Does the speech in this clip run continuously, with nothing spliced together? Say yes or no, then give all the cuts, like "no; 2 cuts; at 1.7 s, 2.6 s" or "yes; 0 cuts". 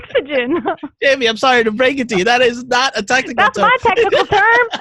yes; 0 cuts